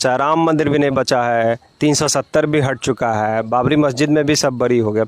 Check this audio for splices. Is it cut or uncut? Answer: uncut